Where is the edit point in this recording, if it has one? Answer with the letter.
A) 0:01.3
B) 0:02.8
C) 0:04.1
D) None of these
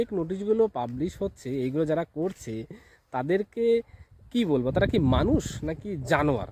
D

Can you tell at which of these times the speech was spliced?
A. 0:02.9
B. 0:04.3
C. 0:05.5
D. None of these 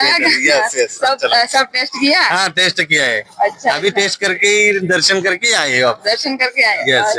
D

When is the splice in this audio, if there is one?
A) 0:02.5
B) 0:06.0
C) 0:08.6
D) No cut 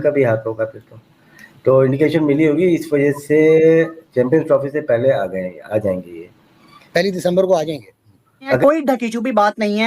C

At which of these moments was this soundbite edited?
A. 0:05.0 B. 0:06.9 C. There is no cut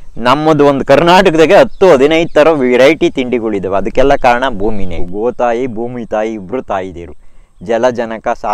A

